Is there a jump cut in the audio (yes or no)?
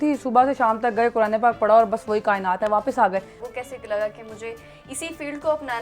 yes